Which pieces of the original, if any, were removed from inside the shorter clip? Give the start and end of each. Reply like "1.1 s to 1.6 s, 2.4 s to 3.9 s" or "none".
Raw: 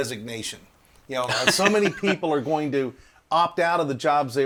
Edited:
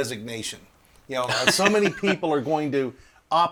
none